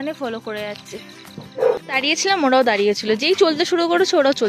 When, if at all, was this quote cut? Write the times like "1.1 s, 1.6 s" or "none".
1.8 s

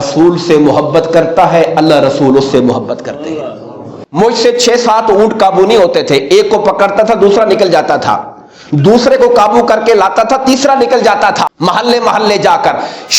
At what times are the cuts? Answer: 4.0 s, 11.5 s

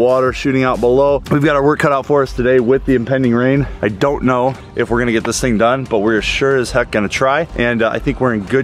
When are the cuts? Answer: 1.2 s

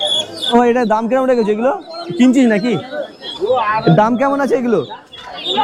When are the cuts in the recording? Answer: none

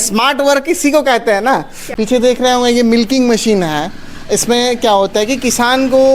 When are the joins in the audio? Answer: 1.8 s

